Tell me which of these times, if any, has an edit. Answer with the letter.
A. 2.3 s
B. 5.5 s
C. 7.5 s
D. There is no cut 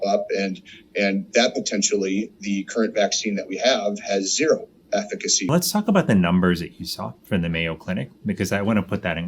B